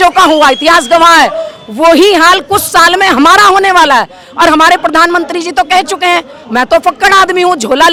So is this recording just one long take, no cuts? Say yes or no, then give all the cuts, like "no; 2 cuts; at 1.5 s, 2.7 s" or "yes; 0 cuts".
yes; 0 cuts